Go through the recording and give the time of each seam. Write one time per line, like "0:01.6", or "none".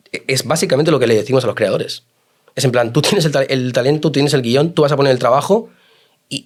none